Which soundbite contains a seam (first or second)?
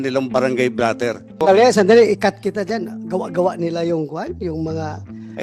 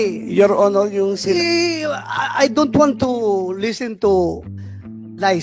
first